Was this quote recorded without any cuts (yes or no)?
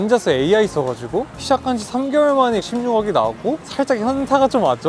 no